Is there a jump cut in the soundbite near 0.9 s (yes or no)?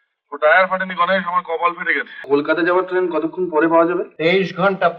no